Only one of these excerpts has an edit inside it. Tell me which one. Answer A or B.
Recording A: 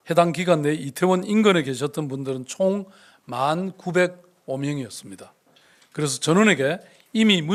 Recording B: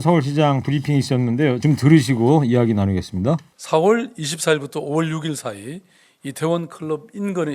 B